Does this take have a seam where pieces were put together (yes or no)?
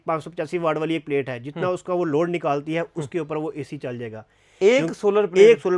no